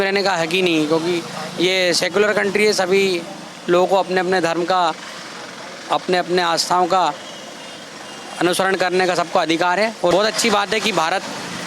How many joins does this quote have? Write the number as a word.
one